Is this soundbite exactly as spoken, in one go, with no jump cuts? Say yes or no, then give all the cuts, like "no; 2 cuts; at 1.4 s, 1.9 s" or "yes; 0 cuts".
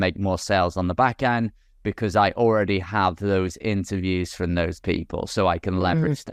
yes; 0 cuts